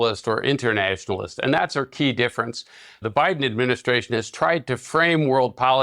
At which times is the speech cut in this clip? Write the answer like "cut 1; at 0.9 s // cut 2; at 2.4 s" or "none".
cut 1; at 3.0 s